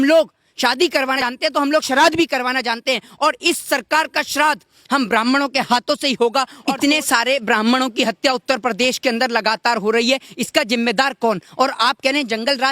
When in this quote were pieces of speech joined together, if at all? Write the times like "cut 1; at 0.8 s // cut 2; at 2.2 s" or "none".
cut 1; at 1.2 s // cut 2; at 6.6 s